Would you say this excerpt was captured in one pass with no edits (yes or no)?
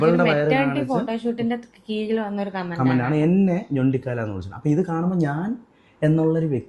yes